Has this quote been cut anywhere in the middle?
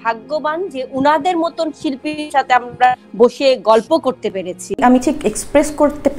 yes; 1 cut; at 4.8 s

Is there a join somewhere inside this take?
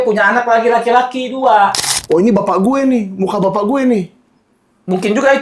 yes; 1 cut; at 1.9 s

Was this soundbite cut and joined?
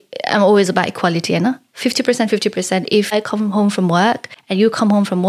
yes; 2 cuts; at 3.1 s, 4.3 s

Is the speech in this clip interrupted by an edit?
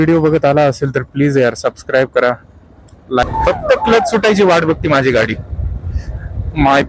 yes; 1 cut; at 3.2 s

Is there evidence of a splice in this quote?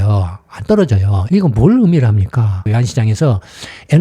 yes; 1 cut; at 1.1 s

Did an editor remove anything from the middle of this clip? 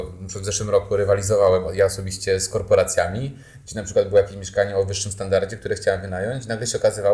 no; 0 cuts

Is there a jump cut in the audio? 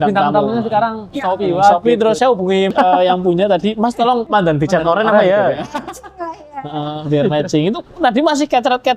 yes; 3 cuts; at 1.1 s, 2.4 s, 4.2 s

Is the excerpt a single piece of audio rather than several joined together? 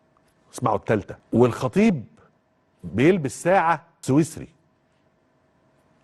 no; 2 cuts; at 1.2 s, 3.9 s

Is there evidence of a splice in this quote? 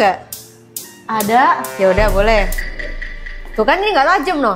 no; 0 cuts

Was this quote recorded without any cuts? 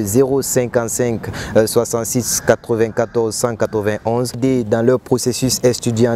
no; 1 cut; at 4.4 s

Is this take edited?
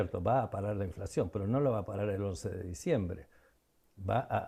no; 0 cuts

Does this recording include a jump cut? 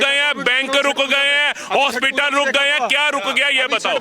no; 0 cuts

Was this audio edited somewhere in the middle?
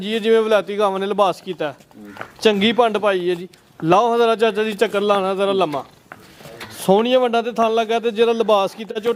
no; 0 cuts

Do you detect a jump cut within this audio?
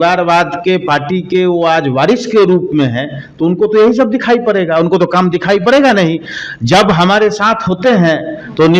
no; 0 cuts

